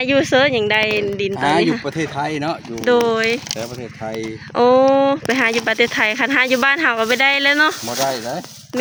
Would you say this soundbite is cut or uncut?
uncut